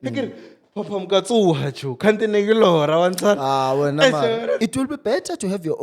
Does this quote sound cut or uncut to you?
cut